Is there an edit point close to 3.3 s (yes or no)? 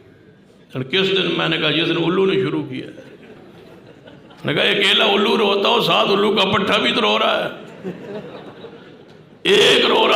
yes